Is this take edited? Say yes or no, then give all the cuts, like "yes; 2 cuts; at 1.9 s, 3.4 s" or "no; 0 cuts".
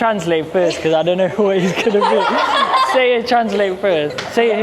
no; 0 cuts